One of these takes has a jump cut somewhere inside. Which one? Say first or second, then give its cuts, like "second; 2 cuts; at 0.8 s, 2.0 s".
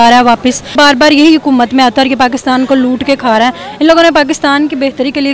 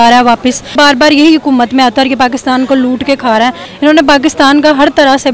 second; 1 cut; at 3.7 s